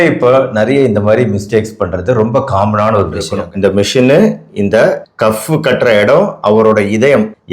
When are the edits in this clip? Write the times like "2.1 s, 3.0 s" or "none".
3.4 s